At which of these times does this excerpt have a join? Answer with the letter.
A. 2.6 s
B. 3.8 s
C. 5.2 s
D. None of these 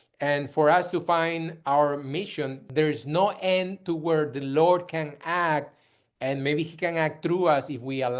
A